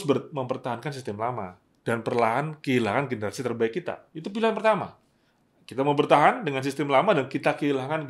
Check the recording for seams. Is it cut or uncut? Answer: uncut